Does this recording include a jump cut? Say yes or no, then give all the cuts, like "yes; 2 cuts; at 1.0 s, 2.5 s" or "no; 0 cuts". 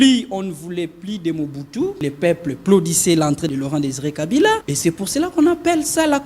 yes; 3 cuts; at 2.0 s, 3.5 s, 4.7 s